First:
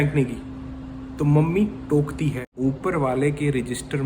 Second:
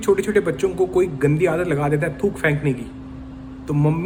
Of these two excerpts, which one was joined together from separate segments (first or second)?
first